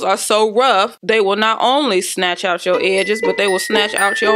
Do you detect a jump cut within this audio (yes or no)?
yes